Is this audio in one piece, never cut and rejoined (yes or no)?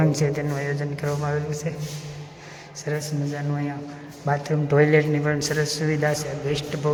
yes